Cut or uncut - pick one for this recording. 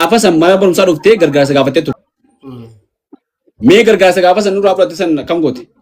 cut